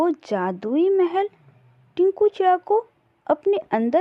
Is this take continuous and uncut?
yes; 0 cuts

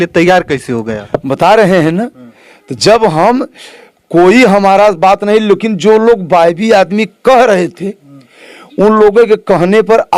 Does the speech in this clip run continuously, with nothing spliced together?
yes; 0 cuts

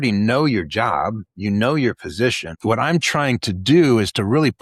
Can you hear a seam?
yes; 1 cut; at 2.5 s

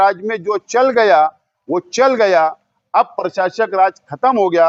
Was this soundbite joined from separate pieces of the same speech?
no; 0 cuts

